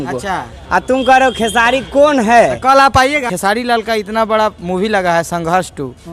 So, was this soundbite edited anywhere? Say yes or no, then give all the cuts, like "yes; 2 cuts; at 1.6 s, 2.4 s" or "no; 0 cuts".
yes; 1 cut; at 3.1 s